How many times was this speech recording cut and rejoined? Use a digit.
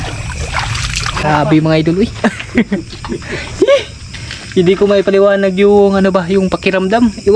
1